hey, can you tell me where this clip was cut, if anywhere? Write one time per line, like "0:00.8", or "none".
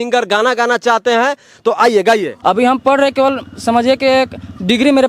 0:02.4